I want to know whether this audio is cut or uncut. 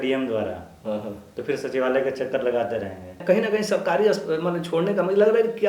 cut